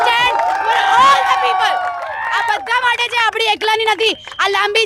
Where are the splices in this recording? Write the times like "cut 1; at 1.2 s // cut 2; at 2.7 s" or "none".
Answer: none